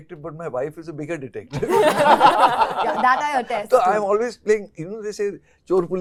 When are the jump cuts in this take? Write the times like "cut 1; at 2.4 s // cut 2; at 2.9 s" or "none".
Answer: none